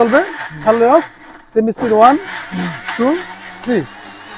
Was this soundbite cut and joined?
no; 0 cuts

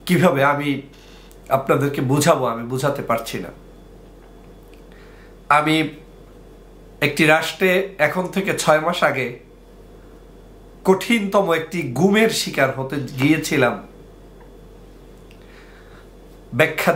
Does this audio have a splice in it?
no; 0 cuts

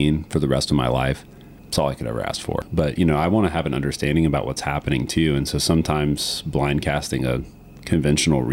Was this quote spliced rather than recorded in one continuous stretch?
yes; 1 cut; at 2.6 s

